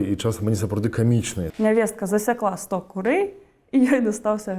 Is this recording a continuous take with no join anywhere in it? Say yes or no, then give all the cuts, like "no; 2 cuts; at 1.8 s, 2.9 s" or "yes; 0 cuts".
no; 1 cut; at 1.5 s